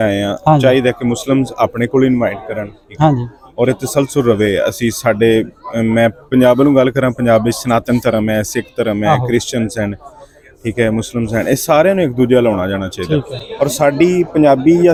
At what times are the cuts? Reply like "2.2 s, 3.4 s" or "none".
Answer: none